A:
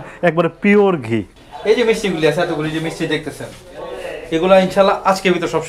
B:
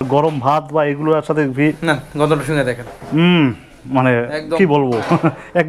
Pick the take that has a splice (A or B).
A